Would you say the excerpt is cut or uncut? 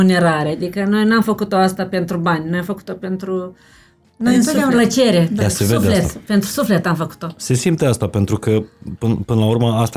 uncut